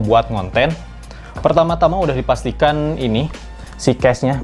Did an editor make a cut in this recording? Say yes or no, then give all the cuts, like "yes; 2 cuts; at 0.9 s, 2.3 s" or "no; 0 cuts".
no; 0 cuts